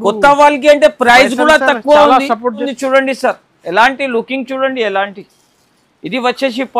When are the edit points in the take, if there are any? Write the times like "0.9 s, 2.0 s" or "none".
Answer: 2.7 s